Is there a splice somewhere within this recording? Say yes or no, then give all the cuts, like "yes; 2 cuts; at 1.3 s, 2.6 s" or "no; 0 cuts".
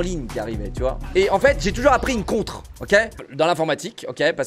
yes; 2 cuts; at 0.9 s, 3.2 s